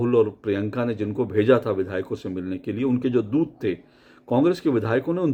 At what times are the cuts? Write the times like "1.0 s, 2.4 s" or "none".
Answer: none